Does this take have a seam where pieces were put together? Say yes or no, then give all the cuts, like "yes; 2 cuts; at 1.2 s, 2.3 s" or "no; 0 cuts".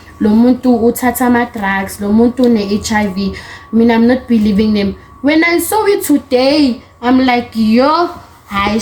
no; 0 cuts